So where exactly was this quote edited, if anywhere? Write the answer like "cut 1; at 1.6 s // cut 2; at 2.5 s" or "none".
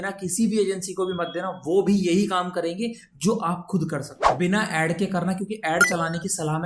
cut 1; at 4.2 s